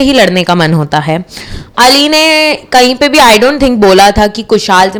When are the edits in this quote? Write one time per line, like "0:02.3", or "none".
none